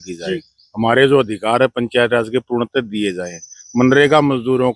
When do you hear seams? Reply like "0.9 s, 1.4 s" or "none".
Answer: none